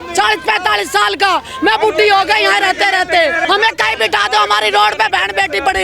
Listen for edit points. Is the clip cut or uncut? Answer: cut